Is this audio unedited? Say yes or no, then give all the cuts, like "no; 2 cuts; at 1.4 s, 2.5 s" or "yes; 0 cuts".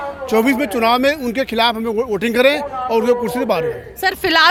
yes; 0 cuts